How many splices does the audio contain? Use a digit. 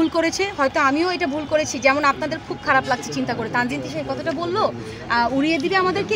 0